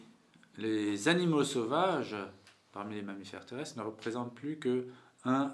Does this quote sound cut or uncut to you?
uncut